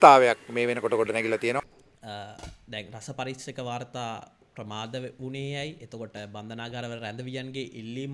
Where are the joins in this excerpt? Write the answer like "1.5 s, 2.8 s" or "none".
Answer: none